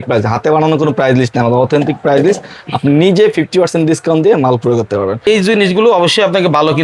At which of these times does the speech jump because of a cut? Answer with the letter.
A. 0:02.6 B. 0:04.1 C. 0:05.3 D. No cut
C